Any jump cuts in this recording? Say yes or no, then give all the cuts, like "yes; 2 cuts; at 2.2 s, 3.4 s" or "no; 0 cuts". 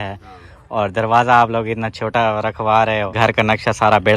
yes; 1 cut; at 3.1 s